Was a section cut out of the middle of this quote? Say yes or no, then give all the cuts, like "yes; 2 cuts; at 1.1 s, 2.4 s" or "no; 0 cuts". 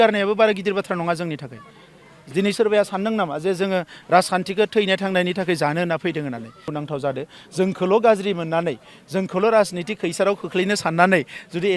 yes; 1 cut; at 6.6 s